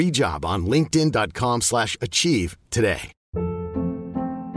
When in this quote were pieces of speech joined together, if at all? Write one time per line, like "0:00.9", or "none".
0:03.1